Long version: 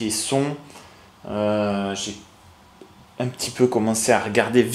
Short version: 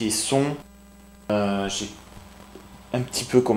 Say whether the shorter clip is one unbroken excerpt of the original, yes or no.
no